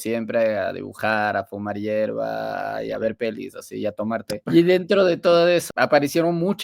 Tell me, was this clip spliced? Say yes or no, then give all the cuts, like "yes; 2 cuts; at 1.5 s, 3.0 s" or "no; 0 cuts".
yes; 2 cuts; at 4.4 s, 5.7 s